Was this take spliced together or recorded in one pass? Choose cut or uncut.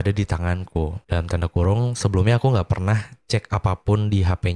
cut